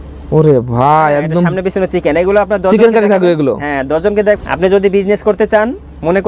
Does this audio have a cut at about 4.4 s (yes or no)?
yes